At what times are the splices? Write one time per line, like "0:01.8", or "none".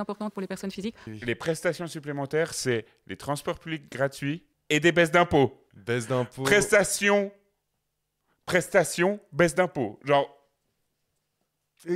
0:01.0
0:04.5
0:05.7